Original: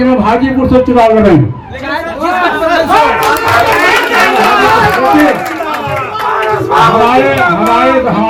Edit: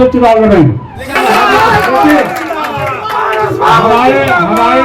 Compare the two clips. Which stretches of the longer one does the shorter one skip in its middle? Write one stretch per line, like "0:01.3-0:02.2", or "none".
0:01.9-0:04.3